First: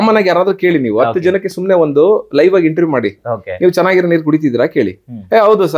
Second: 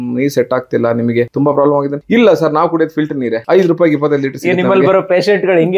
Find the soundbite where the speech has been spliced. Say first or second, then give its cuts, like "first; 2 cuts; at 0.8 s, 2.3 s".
second; 2 cuts; at 1.8 s, 3.4 s